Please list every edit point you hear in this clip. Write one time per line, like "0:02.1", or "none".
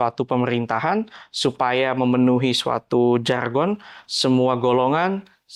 none